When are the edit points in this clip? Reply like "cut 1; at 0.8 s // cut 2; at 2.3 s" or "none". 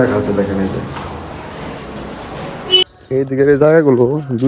cut 1; at 2.8 s